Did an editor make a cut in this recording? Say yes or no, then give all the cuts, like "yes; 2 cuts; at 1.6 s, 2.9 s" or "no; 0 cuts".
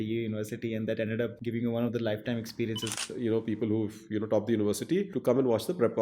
yes; 3 cuts; at 1.4 s, 2.9 s, 5.1 s